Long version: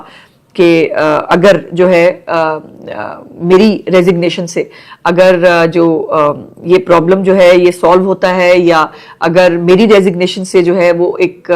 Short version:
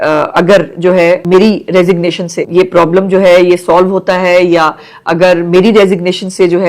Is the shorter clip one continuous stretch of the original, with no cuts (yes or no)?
no